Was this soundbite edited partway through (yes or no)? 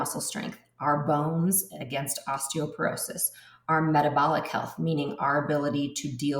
no